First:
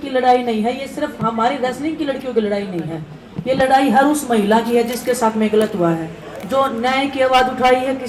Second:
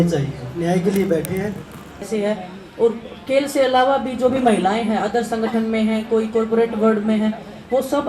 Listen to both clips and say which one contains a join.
second; 1 cut; at 2.0 s

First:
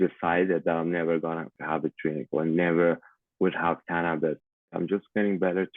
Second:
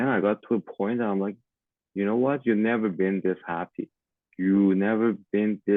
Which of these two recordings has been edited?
first; 2 cuts; at 1.6 s, 4.7 s

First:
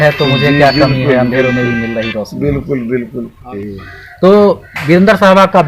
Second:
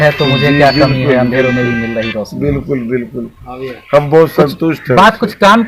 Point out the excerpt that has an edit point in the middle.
first; 1 cut; at 3.6 s

